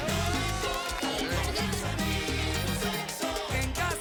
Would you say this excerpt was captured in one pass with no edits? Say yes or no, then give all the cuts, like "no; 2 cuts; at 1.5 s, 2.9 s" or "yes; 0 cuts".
yes; 0 cuts